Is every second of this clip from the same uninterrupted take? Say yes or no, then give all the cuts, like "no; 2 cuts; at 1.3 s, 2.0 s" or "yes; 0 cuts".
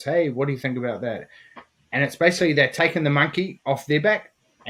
yes; 0 cuts